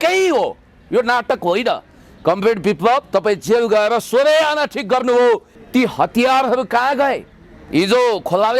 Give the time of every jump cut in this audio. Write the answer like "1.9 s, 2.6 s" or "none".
5.5 s